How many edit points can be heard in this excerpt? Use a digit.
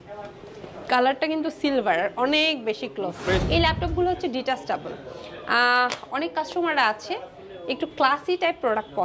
1